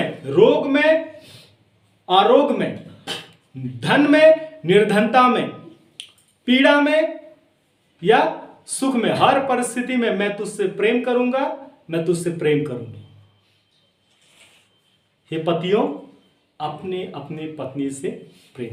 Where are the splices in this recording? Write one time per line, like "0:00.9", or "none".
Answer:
none